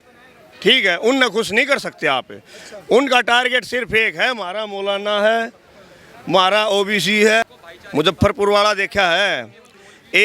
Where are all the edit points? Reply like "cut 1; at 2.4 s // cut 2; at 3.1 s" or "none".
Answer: cut 1; at 7.4 s